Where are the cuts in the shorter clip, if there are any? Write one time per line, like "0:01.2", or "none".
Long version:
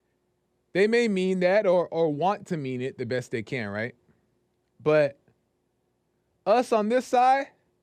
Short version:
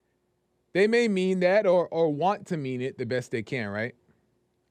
none